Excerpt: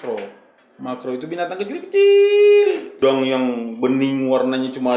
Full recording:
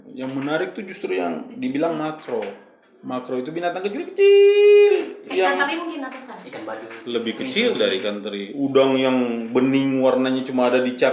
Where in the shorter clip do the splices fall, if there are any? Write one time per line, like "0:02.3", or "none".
0:03.0